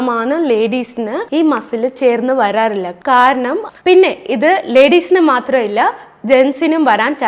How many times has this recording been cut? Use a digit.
1